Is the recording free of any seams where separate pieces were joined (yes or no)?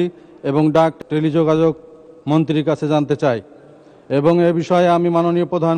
no